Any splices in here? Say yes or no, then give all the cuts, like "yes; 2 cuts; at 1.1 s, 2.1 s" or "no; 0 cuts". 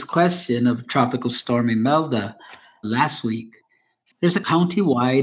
yes; 1 cut; at 2.8 s